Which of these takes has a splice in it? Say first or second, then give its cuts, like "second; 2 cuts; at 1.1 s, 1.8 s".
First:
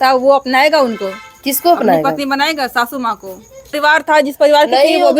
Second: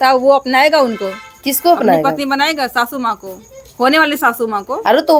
first; 1 cut; at 3.8 s